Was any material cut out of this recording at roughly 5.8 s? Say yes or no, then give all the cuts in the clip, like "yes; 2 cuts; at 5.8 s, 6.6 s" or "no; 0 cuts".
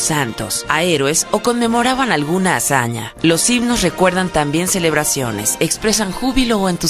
no; 0 cuts